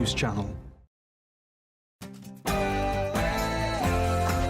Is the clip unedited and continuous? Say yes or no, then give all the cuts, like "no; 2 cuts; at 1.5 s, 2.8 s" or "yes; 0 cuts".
no; 1 cut; at 1.2 s